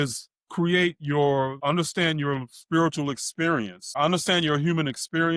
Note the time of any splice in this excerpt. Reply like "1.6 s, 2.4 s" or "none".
1.6 s, 4.0 s